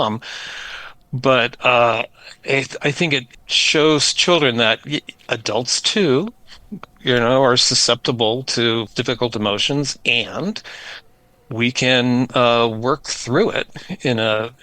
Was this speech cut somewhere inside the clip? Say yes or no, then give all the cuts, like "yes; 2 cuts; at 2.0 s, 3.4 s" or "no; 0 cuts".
yes; 2 cuts; at 3.3 s, 8.9 s